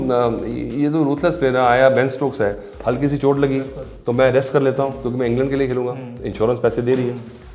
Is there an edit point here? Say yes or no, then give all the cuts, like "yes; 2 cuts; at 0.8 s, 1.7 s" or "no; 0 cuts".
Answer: no; 0 cuts